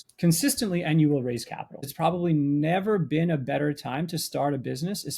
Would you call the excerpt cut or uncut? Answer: cut